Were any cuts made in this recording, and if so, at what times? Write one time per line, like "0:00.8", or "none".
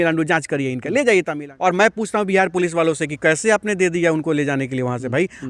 0:01.4